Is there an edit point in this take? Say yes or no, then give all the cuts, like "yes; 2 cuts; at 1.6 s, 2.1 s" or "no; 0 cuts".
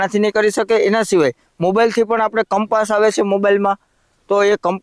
no; 0 cuts